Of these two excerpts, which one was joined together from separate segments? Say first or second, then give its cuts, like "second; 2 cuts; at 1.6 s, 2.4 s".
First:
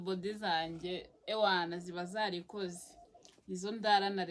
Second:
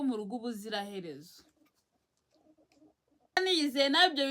second; 1 cut; at 3.4 s